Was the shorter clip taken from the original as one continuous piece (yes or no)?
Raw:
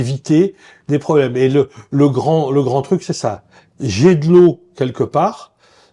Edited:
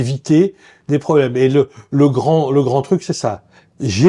yes